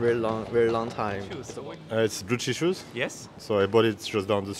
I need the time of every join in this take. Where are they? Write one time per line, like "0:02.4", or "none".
0:01.4